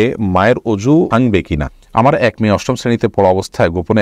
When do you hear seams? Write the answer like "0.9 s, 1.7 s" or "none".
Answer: 1.5 s